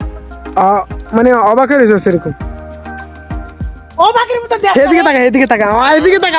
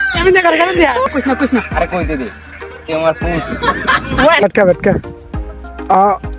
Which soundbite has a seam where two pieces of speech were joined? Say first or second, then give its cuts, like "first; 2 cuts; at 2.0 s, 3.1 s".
second; 2 cuts; at 1.1 s, 4.4 s